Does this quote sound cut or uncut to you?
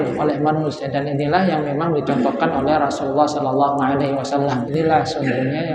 cut